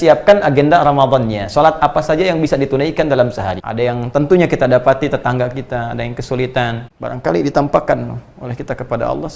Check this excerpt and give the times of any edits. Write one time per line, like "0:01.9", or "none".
0:03.6
0:06.9